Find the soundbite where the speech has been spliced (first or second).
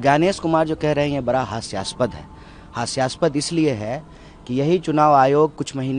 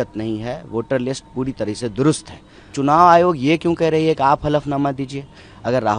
second